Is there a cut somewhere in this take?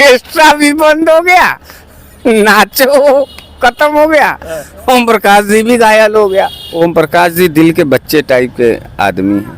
yes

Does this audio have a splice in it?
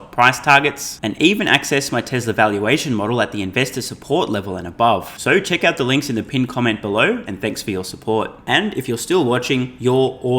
no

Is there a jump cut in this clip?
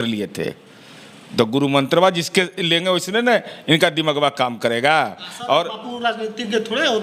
no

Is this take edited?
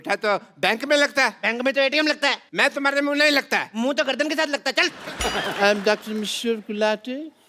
yes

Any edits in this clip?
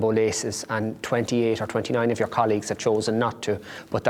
no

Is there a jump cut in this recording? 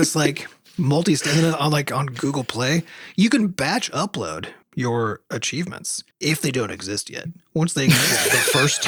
no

